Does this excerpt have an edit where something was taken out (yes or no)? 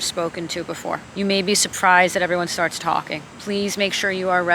yes